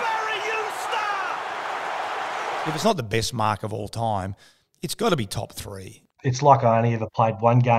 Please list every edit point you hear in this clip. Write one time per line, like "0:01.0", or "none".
0:02.7
0:06.1